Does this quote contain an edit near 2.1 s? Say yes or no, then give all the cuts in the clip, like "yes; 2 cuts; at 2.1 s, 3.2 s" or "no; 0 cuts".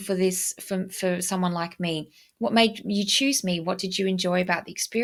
no; 0 cuts